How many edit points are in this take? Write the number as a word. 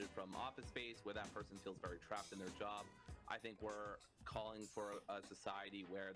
one